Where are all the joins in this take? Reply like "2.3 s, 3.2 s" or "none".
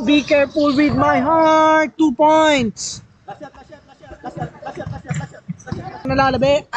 none